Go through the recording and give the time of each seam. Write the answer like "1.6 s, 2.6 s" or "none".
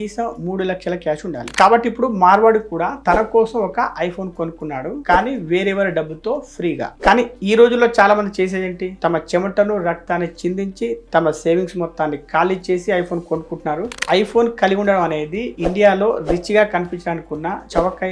1.5 s, 6.9 s, 14.0 s

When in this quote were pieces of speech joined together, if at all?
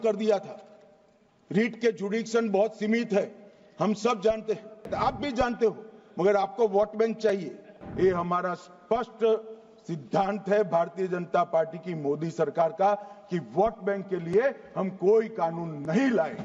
4.9 s, 7.8 s

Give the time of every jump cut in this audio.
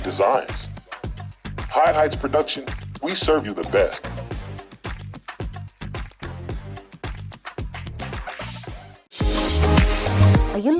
9.1 s

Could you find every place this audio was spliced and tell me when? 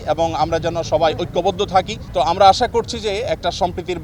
2.0 s

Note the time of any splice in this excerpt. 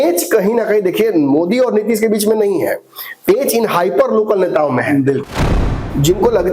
5.3 s

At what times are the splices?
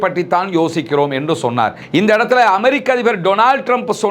none

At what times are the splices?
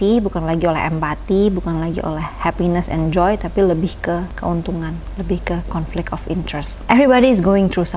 6.8 s

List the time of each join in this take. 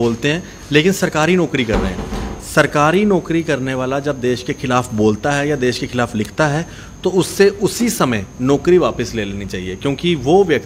none

